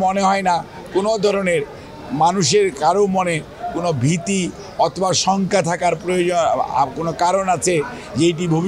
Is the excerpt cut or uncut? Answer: uncut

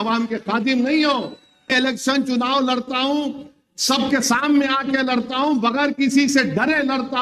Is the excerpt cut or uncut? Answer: cut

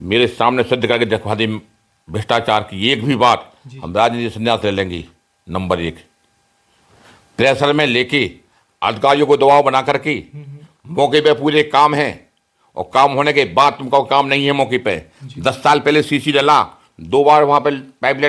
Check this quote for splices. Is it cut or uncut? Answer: uncut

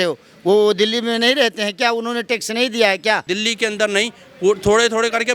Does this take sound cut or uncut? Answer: cut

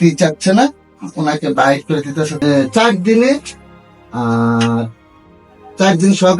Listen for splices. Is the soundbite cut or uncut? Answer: cut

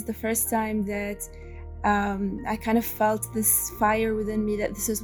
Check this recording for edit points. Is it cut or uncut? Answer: uncut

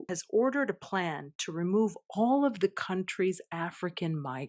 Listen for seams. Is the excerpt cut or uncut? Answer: uncut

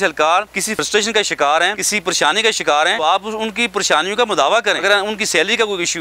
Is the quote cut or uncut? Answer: cut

